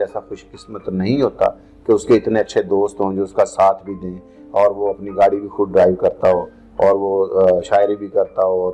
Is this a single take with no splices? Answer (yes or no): yes